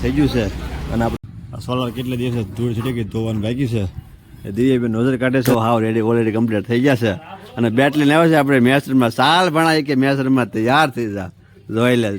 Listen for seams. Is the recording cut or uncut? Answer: cut